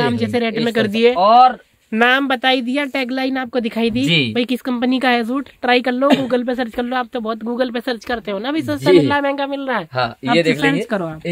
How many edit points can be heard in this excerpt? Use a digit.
0